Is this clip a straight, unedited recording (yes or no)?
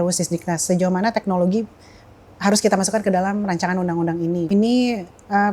no